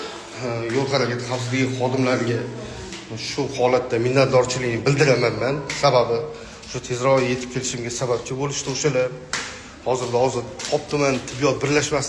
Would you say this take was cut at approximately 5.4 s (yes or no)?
no